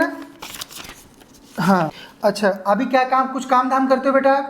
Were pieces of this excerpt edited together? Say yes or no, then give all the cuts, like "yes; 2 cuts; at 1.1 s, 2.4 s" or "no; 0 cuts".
yes; 1 cut; at 2.0 s